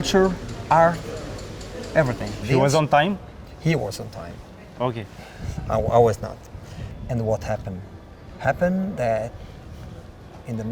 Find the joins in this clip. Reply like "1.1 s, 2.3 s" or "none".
2.4 s